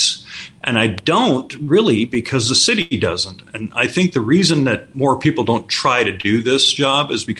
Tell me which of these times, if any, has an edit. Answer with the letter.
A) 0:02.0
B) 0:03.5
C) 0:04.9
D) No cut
C